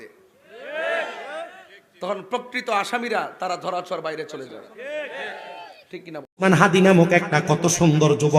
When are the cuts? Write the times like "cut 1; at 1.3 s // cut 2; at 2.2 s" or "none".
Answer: cut 1; at 6.3 s